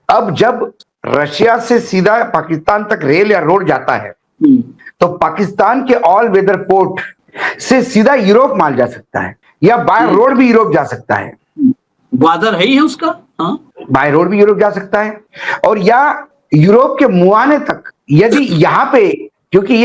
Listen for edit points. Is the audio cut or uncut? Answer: uncut